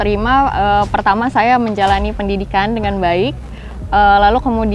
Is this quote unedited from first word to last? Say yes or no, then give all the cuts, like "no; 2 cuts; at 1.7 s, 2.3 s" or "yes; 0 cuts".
yes; 0 cuts